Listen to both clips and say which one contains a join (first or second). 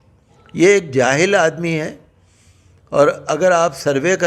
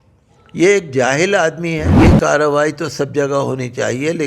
second